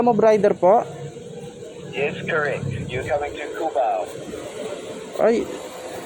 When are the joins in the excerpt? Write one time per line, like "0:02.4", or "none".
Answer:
0:04.4